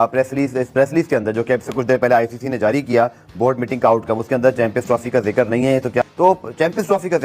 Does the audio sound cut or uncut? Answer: cut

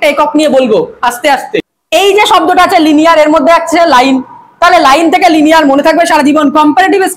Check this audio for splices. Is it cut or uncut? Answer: cut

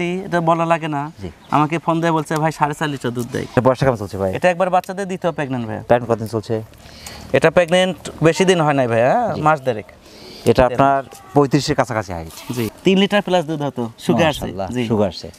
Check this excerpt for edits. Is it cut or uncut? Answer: uncut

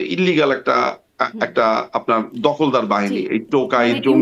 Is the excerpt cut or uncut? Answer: uncut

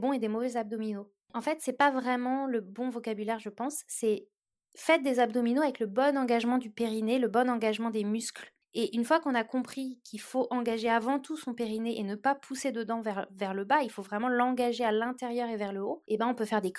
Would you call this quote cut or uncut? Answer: uncut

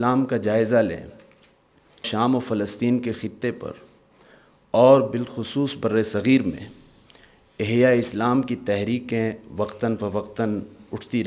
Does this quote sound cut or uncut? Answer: cut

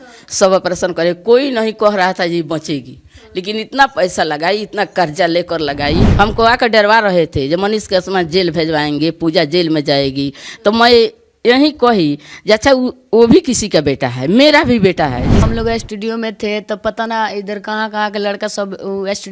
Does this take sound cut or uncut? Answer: cut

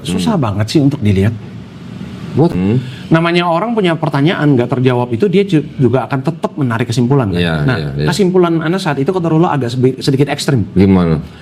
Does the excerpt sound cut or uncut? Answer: cut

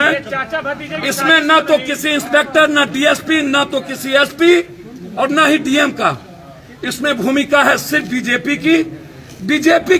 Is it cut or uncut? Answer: uncut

